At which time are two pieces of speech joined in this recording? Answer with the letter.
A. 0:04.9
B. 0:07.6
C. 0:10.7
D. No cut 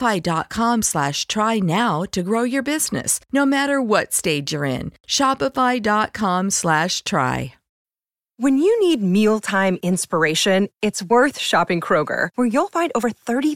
B